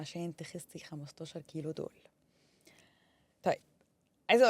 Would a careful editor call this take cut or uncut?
uncut